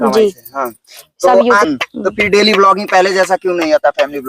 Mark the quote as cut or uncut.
cut